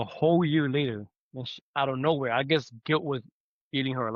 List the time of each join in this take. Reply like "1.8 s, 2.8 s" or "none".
none